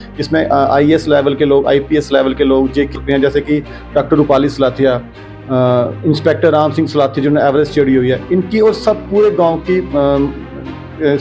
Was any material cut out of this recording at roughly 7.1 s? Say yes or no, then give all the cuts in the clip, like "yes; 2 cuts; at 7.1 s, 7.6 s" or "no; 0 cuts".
no; 1 cut; at 2.9 s